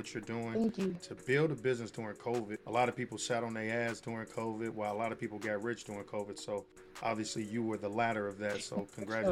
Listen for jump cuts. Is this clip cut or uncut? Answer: cut